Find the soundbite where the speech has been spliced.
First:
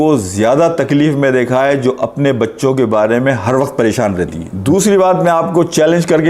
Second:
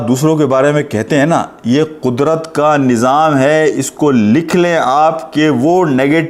first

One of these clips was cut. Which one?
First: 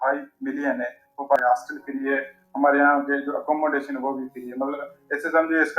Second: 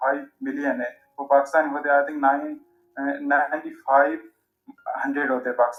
first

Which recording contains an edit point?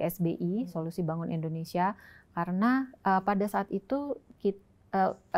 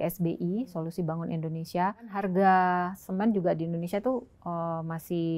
second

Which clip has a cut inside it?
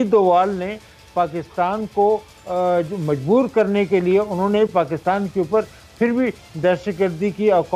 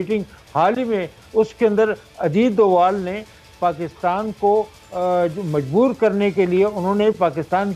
second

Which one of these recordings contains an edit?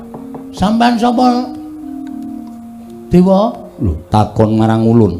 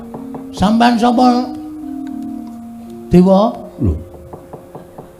first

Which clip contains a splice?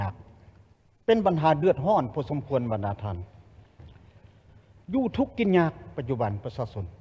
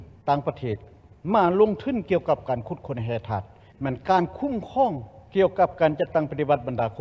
second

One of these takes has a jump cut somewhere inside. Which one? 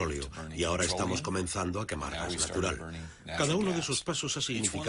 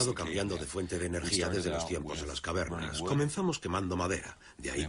second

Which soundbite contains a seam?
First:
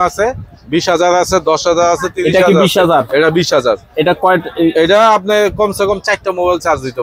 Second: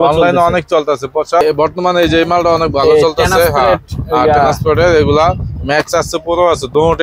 second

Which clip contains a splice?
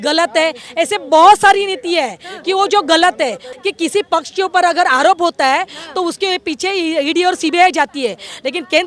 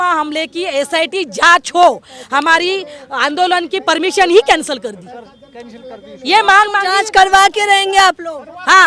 first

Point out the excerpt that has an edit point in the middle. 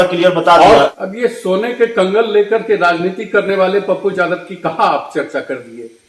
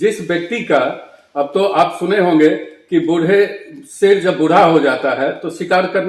first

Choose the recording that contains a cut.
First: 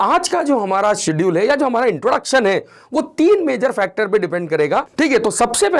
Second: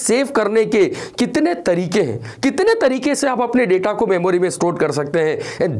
first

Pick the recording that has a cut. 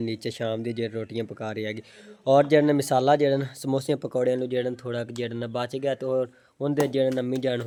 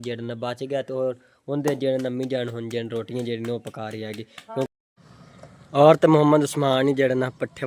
second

